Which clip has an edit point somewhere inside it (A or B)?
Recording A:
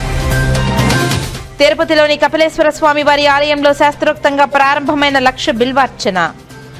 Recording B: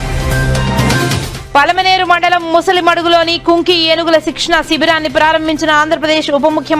B